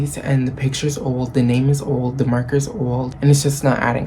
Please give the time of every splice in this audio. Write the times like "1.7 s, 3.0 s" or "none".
3.1 s